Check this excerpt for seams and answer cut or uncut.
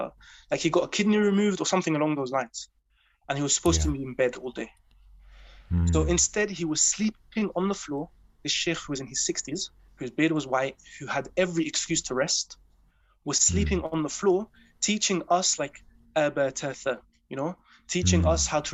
uncut